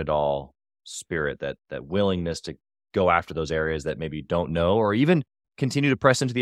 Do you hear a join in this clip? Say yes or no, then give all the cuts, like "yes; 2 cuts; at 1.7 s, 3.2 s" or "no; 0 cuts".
no; 0 cuts